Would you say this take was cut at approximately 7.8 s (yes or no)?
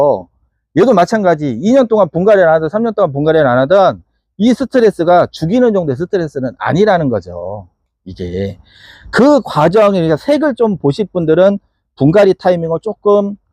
no